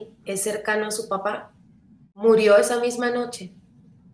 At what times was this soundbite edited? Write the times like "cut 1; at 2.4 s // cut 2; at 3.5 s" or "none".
cut 1; at 2.2 s

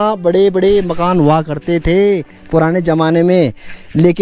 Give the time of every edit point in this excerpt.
none

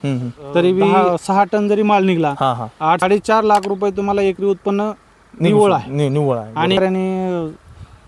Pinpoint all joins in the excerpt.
cut 1; at 0.9 s // cut 2; at 3.0 s // cut 3; at 6.8 s

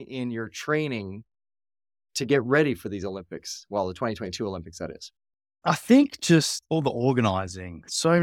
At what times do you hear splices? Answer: cut 1; at 5.2 s

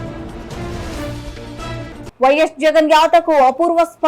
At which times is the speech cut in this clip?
cut 1; at 2.0 s

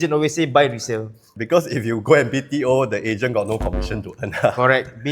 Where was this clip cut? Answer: cut 1; at 1.3 s

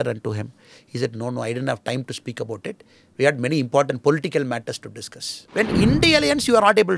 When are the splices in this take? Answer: cut 1; at 5.4 s

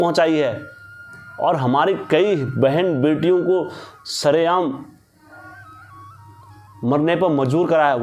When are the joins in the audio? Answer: none

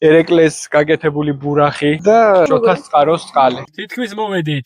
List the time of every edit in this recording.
cut 1; at 3.8 s

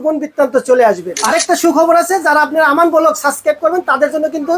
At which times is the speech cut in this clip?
cut 1; at 1.1 s

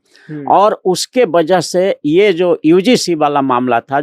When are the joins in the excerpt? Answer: none

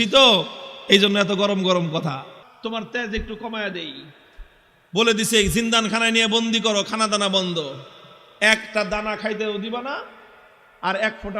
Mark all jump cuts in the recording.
cut 1; at 2.4 s

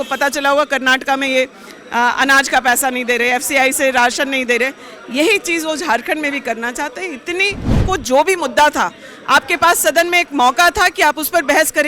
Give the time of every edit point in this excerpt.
cut 1; at 7.8 s

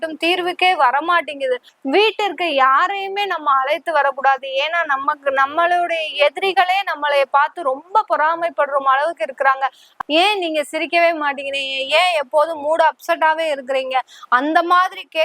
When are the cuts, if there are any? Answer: cut 1; at 1.7 s // cut 2; at 9.9 s

